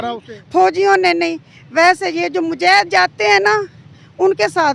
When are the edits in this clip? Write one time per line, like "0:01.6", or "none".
none